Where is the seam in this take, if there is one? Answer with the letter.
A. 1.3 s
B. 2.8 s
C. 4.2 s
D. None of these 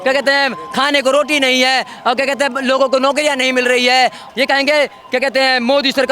C